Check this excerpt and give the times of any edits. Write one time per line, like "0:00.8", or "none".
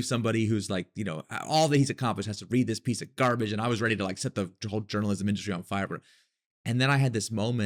none